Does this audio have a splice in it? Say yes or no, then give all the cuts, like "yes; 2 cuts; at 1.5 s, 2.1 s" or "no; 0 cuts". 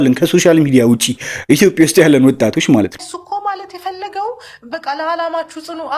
yes; 1 cut; at 3.0 s